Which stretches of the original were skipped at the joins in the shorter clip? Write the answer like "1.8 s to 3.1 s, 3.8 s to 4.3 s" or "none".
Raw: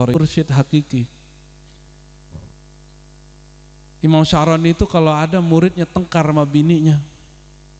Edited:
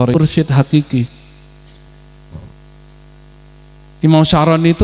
none